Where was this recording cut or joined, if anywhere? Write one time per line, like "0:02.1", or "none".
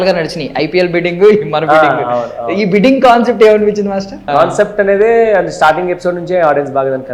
0:04.2